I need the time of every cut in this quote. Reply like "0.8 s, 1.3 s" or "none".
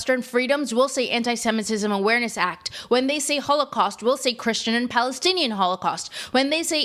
none